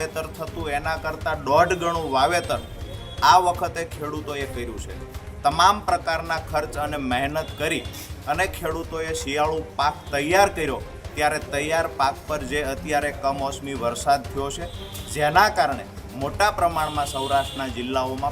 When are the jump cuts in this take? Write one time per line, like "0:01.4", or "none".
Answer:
none